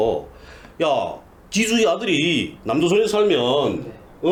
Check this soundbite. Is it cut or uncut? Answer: uncut